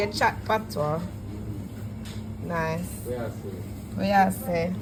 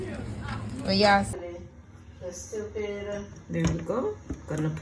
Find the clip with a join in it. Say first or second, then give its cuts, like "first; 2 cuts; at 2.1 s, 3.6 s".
second; 1 cut; at 1.3 s